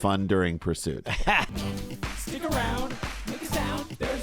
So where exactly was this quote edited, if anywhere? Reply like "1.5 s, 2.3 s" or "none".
1.5 s